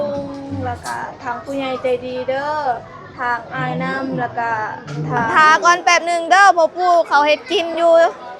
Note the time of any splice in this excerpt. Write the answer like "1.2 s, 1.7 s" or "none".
5.3 s